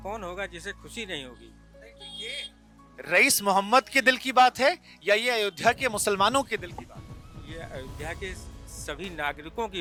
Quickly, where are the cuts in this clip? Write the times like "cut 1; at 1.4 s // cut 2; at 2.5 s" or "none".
none